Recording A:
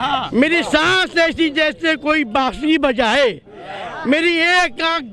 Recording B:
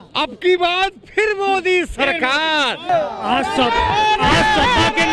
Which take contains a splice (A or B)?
B